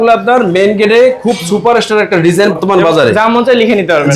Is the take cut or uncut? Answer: cut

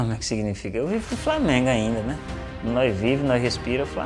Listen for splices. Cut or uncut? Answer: uncut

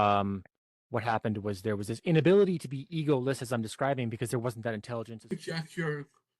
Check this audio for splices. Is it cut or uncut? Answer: cut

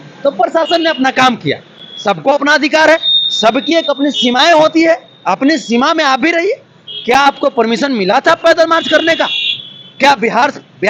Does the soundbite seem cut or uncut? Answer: uncut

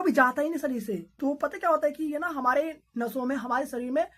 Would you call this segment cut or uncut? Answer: cut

